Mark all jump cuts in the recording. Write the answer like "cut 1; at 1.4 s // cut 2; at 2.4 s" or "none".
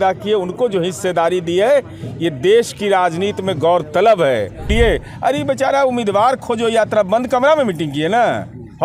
cut 1; at 4.7 s